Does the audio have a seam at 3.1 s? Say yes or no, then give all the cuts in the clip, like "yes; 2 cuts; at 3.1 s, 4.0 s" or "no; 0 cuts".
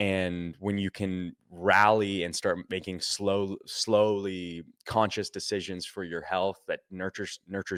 no; 0 cuts